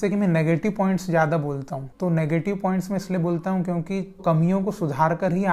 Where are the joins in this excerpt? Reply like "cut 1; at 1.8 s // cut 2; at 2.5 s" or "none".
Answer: none